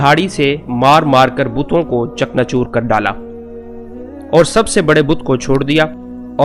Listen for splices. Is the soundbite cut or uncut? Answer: uncut